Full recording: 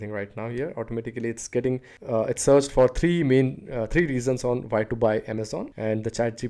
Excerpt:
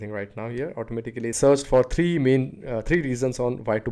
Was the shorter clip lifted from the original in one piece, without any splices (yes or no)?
no